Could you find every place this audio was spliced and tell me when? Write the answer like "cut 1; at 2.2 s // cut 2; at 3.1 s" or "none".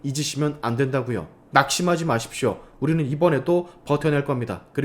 cut 1; at 1.4 s